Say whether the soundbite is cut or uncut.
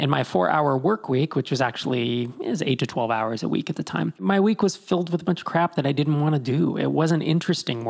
cut